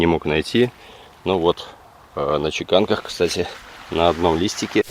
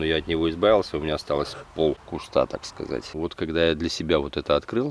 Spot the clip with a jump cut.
second; 2 cuts; at 2.1 s, 3.1 s

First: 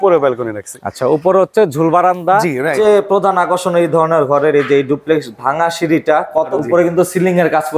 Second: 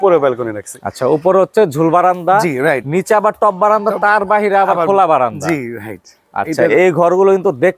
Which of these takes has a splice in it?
first; 2 cuts; at 2.7 s, 6.5 s

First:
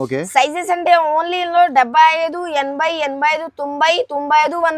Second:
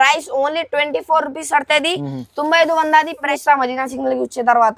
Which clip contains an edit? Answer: second; 1 cut; at 3.3 s

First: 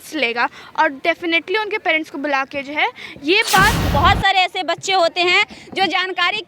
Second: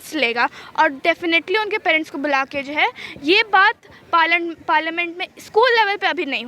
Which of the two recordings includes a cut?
first; 1 cut; at 3.8 s

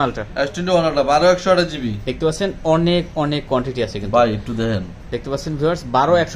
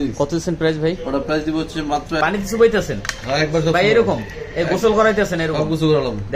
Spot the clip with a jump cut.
second; 1 cut; at 2.2 s

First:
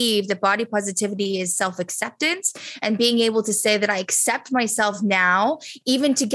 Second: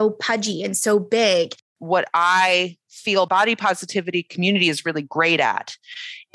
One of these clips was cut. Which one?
second; 2 cuts; at 1.8 s, 3.3 s

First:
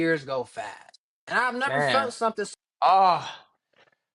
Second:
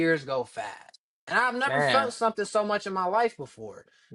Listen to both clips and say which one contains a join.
first; 1 cut; at 2.5 s

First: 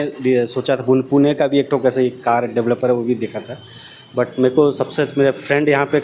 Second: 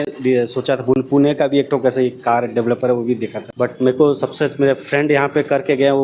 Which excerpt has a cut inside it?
second; 1 cut; at 3.4 s

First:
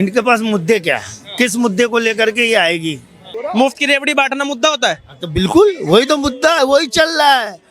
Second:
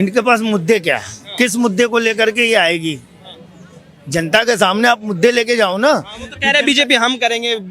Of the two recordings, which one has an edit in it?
first; 1 cut; at 3.4 s

